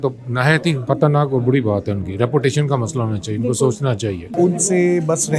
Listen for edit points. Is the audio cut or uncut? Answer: cut